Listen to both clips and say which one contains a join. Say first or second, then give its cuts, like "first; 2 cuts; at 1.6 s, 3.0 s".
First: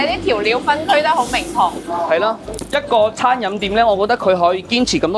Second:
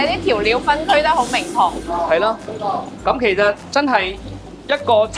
first; 1 cut; at 2.5 s